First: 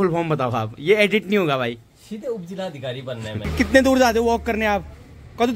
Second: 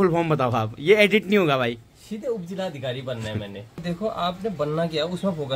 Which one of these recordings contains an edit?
first; 1 cut; at 3.5 s

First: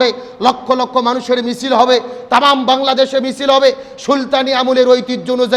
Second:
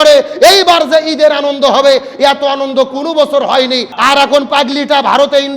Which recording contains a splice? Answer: second; 1 cut; at 3.9 s

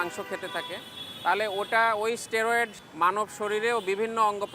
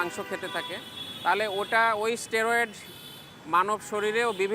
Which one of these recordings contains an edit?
first; 1 cut; at 2.8 s

